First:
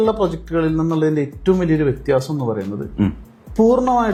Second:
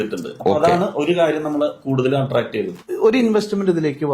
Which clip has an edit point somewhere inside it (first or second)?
second